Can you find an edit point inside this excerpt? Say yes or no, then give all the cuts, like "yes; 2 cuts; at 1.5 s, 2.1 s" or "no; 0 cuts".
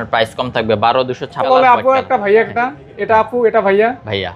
yes; 1 cut; at 1.5 s